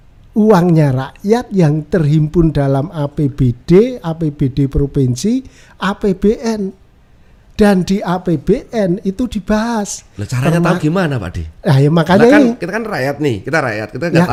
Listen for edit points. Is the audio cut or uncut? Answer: uncut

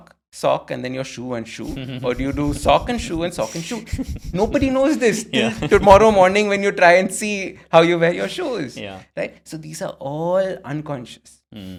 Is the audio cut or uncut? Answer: uncut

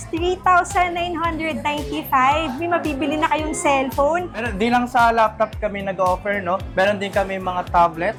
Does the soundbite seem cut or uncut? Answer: uncut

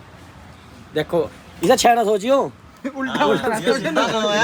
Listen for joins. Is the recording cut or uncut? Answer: uncut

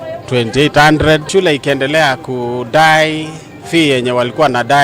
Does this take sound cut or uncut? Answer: cut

